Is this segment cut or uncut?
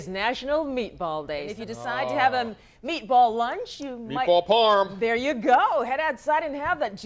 cut